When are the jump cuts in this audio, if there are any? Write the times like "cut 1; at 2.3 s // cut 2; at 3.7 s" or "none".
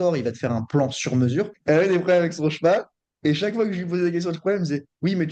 cut 1; at 1.5 s